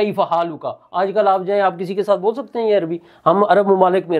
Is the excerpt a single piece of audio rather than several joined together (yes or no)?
yes